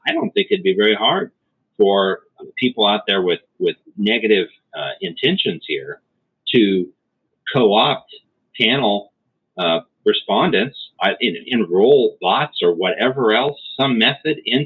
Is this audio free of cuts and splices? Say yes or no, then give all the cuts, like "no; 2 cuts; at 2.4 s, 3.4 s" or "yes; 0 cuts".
no; 2 cuts; at 2.3 s, 3.9 s